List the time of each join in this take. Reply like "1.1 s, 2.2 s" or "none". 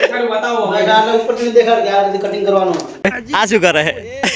3.0 s